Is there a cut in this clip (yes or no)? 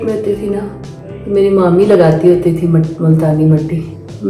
no